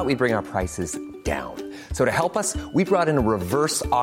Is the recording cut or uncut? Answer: uncut